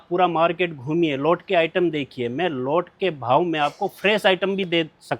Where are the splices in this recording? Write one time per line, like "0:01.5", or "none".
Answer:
none